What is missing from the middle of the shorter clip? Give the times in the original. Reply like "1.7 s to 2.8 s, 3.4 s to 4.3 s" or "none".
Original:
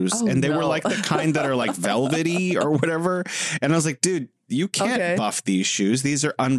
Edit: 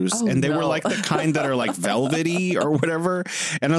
none